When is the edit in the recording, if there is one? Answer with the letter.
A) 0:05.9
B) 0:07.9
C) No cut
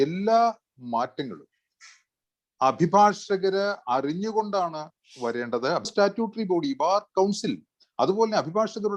A